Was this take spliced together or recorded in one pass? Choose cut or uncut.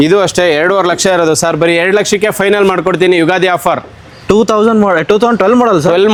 uncut